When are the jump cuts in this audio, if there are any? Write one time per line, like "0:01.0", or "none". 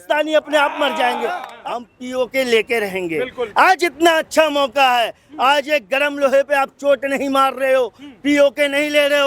0:01.5